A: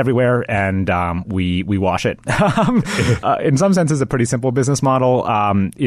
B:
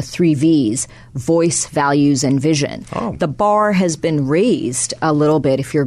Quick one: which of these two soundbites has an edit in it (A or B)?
A